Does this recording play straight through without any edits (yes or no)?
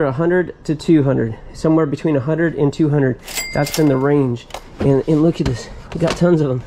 yes